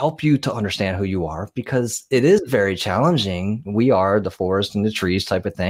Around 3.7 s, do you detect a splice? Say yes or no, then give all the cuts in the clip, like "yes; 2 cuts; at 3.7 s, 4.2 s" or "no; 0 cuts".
no; 0 cuts